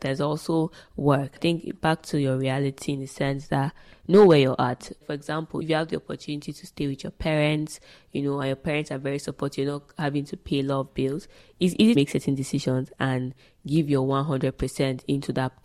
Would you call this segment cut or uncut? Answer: cut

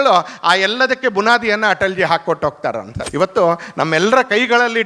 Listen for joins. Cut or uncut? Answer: cut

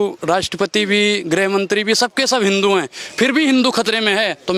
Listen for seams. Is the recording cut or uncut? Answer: uncut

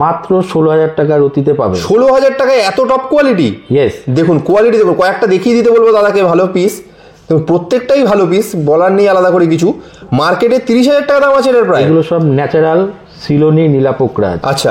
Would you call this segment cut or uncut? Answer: uncut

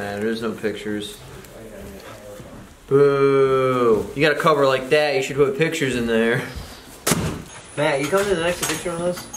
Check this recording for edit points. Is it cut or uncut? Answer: cut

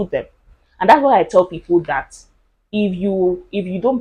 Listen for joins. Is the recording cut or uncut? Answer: uncut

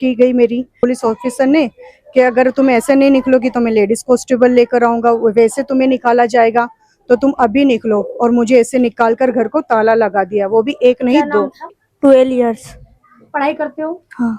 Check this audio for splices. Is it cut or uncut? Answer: cut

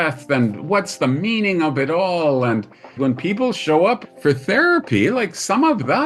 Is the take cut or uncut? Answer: cut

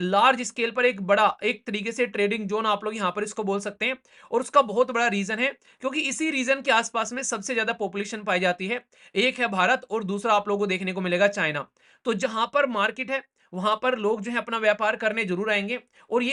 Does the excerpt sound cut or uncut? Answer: uncut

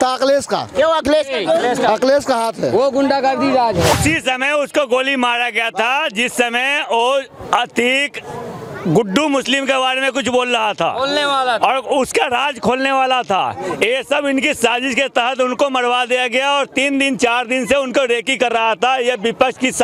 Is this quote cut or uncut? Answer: uncut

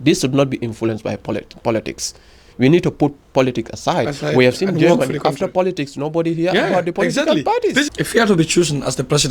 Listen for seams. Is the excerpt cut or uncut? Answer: cut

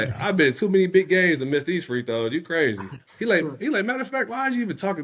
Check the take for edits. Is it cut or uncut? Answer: uncut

